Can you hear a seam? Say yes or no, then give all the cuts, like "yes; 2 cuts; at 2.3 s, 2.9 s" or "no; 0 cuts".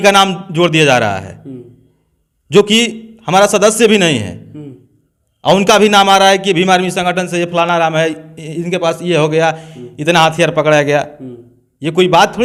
no; 0 cuts